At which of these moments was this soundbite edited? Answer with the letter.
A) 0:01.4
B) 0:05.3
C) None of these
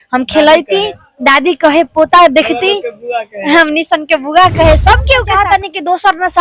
B